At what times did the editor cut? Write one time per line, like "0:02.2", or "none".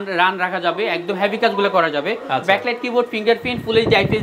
none